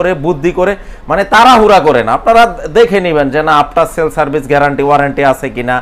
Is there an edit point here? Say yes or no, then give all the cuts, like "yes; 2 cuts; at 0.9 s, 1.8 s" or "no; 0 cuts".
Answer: no; 0 cuts